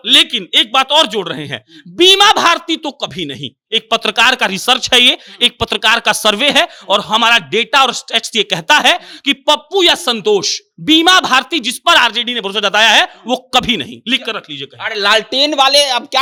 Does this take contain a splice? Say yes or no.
no